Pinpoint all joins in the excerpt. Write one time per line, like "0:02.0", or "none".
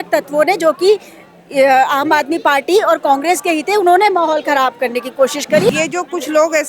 0:05.7